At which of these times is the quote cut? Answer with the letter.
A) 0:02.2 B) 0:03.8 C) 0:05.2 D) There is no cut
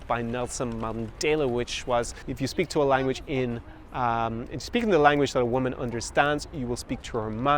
A